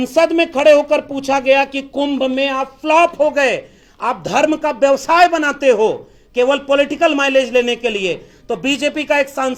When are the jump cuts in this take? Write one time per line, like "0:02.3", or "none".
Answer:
none